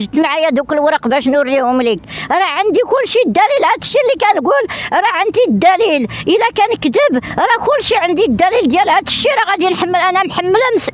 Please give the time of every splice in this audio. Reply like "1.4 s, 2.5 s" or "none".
none